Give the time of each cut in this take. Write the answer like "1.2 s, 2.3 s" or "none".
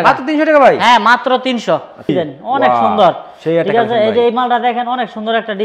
2.1 s